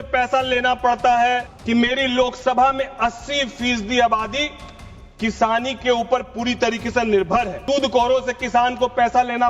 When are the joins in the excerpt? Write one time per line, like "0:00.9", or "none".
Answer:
0:01.5
0:07.6